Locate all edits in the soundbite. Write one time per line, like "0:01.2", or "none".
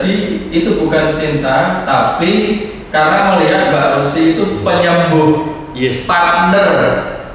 none